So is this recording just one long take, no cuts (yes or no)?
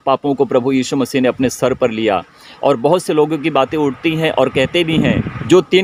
yes